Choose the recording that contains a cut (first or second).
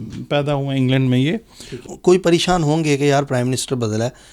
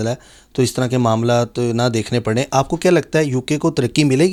first